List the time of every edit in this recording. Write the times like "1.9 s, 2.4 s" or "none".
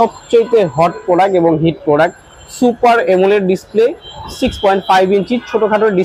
none